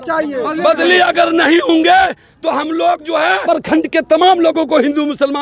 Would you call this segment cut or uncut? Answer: cut